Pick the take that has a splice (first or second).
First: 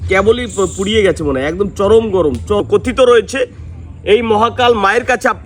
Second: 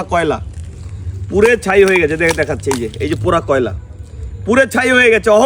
first